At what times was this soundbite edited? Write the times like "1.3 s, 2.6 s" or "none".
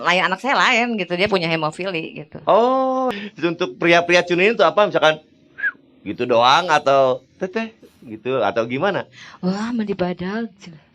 3.1 s